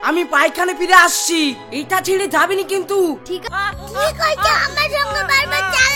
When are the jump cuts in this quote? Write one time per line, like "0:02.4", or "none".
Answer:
0:03.4